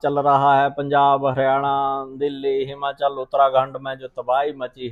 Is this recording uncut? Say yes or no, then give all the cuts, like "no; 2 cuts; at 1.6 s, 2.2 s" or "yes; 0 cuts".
yes; 0 cuts